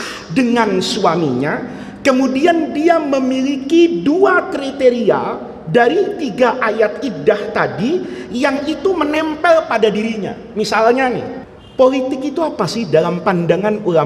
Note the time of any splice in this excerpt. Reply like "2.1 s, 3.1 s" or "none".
11.4 s